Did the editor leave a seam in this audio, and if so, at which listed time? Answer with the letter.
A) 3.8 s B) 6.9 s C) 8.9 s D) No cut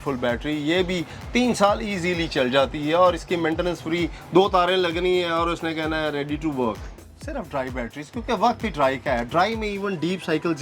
B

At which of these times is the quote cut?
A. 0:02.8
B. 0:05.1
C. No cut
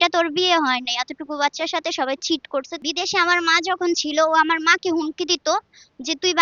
A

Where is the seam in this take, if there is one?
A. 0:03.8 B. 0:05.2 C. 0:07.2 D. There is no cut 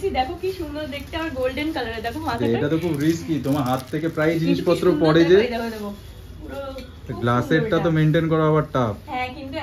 D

